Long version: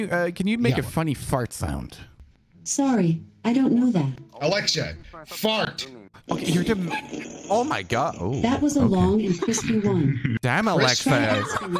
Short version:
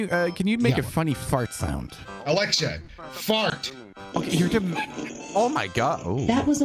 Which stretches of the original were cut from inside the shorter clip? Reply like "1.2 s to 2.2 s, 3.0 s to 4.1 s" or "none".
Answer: 2.1 s to 4.2 s